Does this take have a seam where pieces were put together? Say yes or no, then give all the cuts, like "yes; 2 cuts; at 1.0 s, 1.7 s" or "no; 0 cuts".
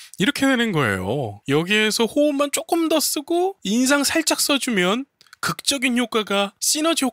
yes; 1 cut; at 3.6 s